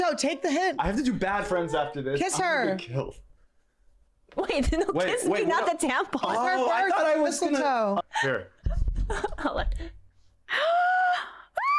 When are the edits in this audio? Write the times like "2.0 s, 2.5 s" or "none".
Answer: 8.0 s